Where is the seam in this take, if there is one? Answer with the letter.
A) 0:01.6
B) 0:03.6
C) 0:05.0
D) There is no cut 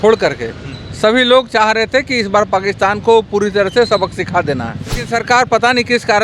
C